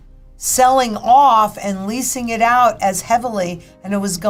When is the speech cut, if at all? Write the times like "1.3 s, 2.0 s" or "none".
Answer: none